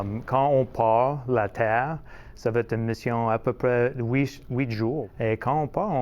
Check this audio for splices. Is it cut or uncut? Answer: cut